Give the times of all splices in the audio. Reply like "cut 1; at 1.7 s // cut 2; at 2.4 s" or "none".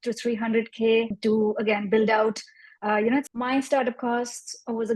cut 1; at 1.1 s // cut 2; at 3.3 s